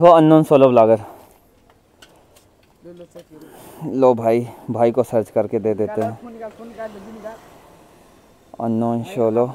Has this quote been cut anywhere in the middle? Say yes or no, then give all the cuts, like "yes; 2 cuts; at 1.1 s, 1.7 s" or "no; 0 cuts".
no; 0 cuts